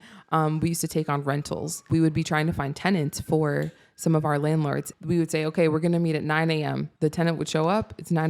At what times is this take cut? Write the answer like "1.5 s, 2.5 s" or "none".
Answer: 1.8 s, 4.9 s, 6.9 s